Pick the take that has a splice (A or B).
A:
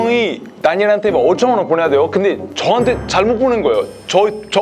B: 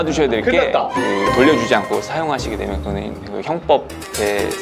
B